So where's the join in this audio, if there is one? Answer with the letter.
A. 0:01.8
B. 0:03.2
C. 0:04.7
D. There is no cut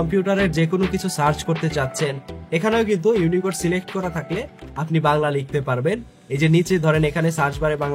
D